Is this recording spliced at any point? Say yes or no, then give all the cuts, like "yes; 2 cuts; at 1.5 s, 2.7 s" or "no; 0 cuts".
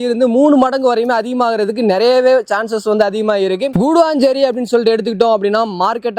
no; 0 cuts